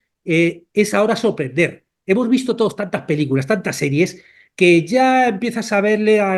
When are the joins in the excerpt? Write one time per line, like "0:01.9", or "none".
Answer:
none